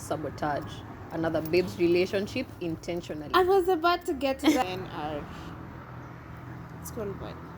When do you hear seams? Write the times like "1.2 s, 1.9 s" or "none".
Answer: 4.6 s